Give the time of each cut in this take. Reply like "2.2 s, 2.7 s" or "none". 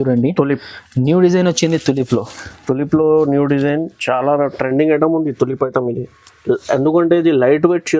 none